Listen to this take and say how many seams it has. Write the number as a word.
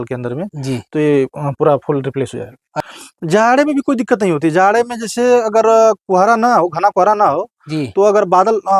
one